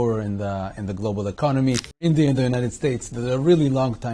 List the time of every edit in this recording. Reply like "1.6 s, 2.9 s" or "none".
2.0 s